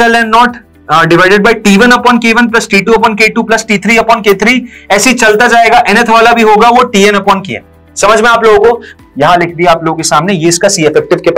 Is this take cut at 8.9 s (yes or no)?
yes